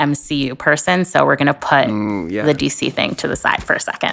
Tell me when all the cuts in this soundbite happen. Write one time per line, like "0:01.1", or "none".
none

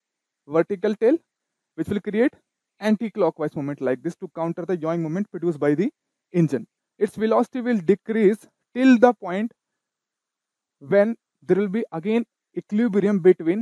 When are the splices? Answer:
0:06.8

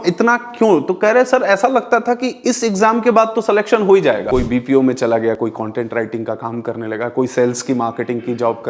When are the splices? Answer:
0:04.2

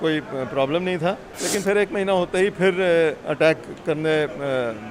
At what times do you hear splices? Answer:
0:01.3

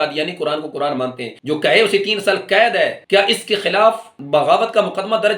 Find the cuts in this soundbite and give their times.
0:01.3
0:03.0

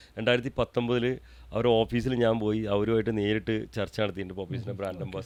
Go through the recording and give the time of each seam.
none

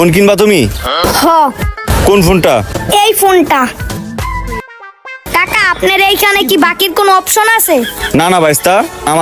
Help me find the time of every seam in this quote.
0:05.2

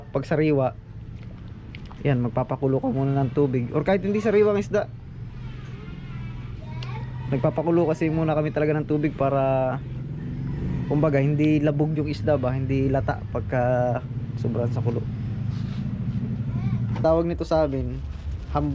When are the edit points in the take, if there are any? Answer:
0:17.0

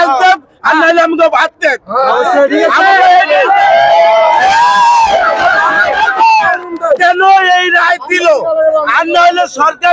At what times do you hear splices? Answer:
none

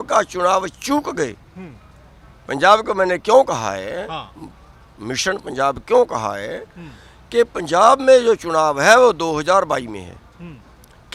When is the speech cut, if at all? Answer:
none

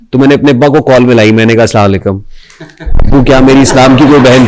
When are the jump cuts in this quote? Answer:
none

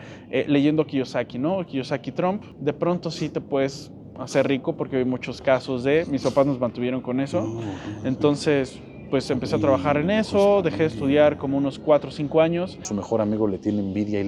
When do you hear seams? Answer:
0:02.5
0:12.8

